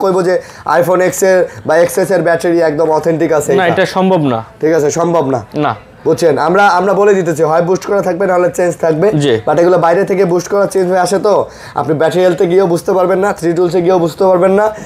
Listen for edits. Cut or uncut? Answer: uncut